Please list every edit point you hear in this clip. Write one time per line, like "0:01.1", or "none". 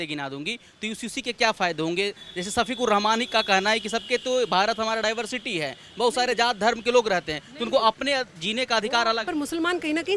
0:09.2